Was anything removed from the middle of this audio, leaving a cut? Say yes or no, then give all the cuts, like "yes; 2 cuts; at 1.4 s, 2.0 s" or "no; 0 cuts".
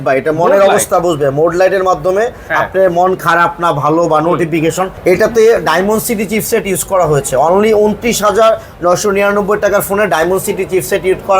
yes; 1 cut; at 4.9 s